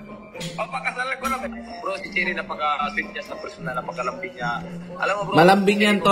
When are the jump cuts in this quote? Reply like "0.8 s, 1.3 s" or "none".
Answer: 1.6 s